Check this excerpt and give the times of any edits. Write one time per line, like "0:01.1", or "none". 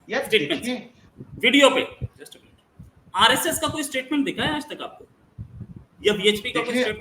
none